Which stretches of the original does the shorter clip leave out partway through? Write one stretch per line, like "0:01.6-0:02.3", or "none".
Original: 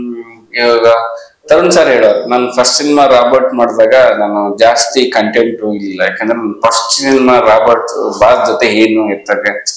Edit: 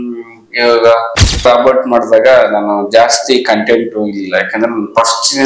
0:01.4-0:03.1

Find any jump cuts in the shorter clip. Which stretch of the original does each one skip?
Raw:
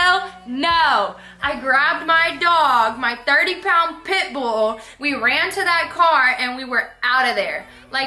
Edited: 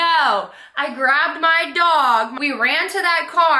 0:03.0-0:05.0

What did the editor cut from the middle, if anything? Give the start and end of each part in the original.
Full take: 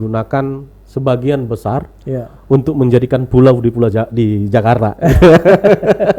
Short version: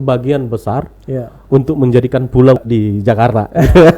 0:03.6-0:04.1

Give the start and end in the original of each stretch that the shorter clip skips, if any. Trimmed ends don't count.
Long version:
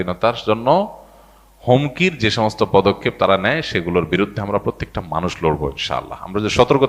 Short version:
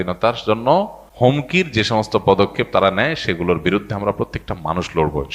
0:01.0-0:01.5

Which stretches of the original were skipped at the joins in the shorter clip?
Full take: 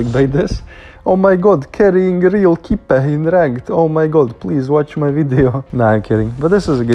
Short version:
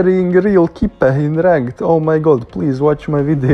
none

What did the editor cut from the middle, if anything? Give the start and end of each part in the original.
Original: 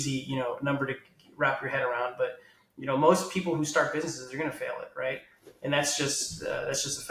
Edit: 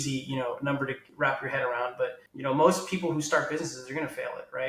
0:01.0-0:01.2
0:02.5-0:02.7

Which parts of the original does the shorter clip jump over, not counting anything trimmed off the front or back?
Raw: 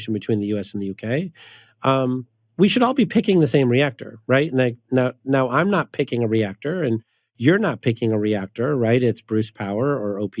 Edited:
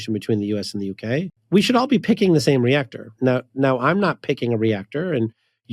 0:01.4-0:02.4
0:04.2-0:04.8

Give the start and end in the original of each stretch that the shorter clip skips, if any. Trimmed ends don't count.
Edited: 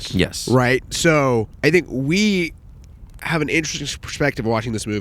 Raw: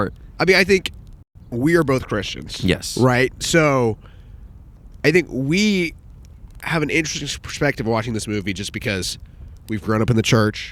0:04.0-0:04.9

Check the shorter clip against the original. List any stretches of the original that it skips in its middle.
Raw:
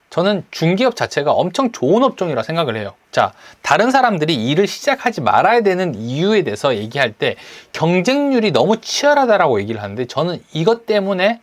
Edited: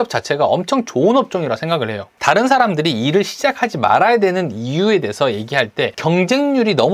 0:02.9-0:03.5
0:07.4-0:07.7

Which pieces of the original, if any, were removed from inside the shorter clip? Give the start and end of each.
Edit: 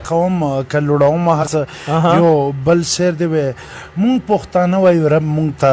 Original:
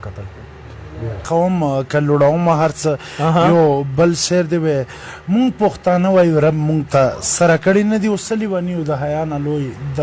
0:02.6-0:02.7

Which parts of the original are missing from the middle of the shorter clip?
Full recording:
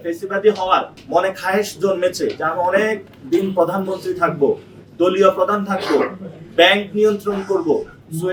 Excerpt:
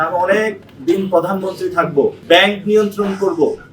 0:04.6-0:06.5

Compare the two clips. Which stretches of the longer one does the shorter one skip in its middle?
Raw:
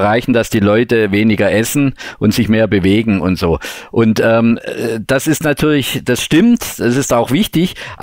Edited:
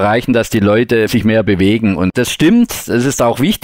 0:01.1-0:02.3
0:03.4-0:06.0

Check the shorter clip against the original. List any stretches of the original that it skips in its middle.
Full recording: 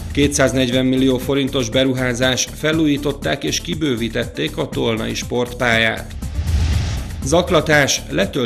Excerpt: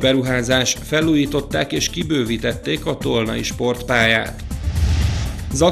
none

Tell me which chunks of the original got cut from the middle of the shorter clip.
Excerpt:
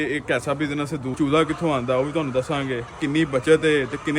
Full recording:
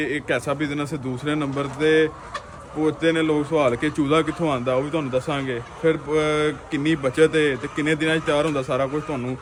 0:01.2-0:03.9
0:05.7-0:06.6

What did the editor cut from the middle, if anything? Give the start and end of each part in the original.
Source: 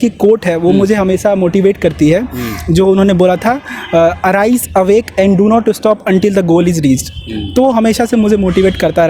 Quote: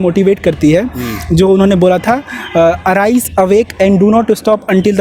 none

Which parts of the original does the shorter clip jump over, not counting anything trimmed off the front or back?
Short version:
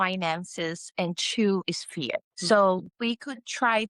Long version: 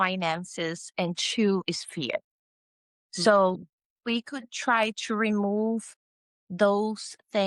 0:02.3-0:03.1
0:03.7-0:04.0

